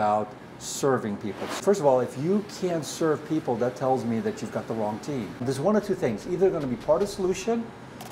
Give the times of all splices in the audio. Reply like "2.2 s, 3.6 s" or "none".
1.6 s, 5.4 s